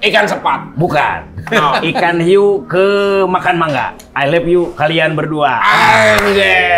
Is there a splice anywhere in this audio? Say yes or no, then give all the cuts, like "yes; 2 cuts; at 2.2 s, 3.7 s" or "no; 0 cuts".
yes; 1 cut; at 4.0 s